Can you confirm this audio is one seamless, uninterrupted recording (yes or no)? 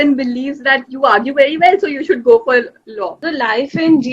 no